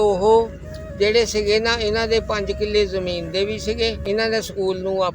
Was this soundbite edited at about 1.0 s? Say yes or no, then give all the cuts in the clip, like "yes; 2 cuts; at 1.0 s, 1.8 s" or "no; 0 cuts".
no; 1 cut; at 4.0 s